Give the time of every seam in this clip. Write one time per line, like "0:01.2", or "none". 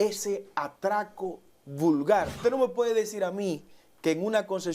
0:02.4